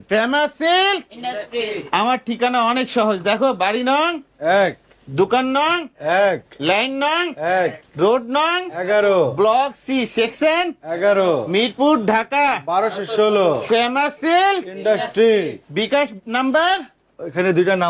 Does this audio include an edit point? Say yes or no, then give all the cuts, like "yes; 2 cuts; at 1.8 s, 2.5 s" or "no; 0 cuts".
no; 0 cuts